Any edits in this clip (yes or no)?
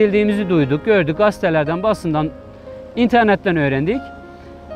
no